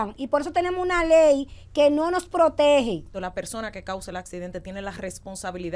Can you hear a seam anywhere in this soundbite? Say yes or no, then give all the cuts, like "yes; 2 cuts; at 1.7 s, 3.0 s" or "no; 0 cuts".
yes; 1 cut; at 3.1 s